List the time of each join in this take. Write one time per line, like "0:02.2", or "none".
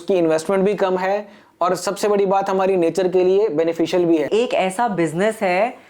0:04.3

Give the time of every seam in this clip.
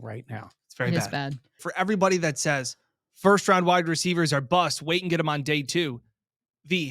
0:01.6

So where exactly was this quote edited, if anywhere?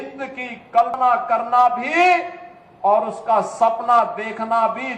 0:01.0

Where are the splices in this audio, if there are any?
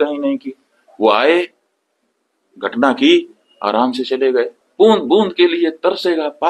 0:04.6

